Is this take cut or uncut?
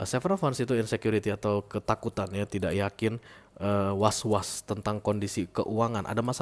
uncut